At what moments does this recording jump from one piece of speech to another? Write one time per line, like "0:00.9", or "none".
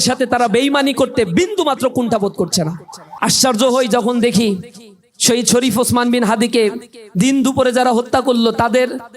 0:03.1

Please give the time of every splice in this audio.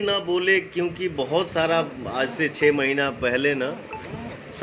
none

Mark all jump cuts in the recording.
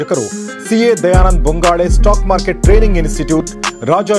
none

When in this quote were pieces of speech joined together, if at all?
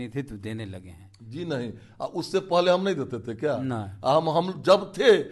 none

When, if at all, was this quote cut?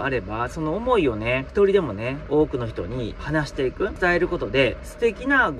0:01.5

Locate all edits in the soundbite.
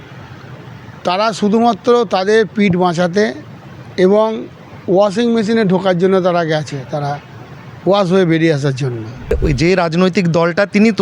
0:09.3

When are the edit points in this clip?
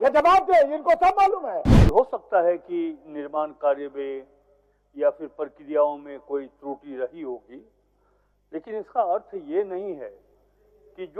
0:01.7

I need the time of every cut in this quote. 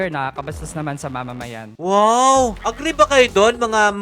0:01.7
0:02.6

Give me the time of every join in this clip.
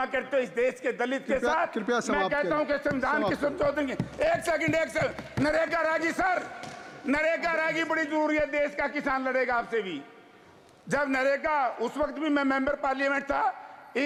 none

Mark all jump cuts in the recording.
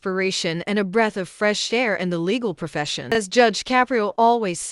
0:03.1

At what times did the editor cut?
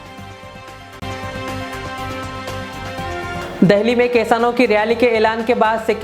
0:01.0
0:03.5

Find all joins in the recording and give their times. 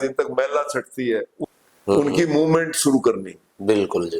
0:01.3

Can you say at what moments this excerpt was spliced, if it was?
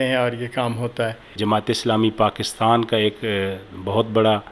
0:01.4

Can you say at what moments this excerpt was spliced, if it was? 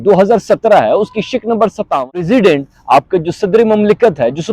0:02.1

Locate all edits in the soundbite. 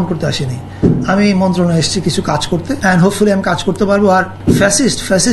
0:02.8
0:04.3

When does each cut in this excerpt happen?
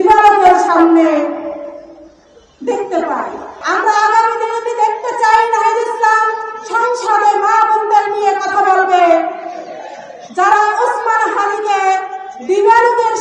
0:03.5

